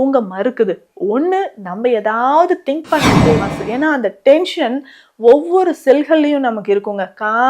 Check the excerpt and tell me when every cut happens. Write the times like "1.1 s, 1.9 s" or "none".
3.1 s